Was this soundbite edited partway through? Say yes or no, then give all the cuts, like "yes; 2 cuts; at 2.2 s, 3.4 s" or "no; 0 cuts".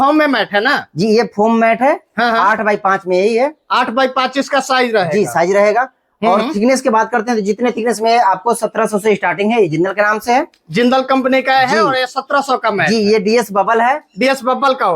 no; 0 cuts